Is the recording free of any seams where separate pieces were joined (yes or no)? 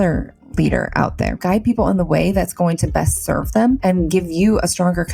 no